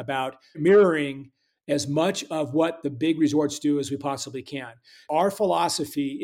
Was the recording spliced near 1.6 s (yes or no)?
no